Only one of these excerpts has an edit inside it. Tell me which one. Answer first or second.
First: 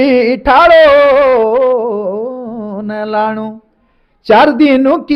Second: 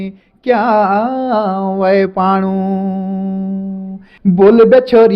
second